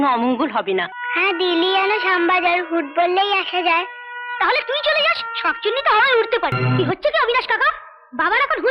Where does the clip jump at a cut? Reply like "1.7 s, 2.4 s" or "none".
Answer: 1.0 s, 6.6 s